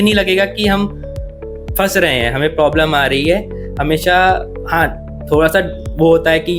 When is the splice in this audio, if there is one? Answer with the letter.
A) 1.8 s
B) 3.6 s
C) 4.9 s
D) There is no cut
D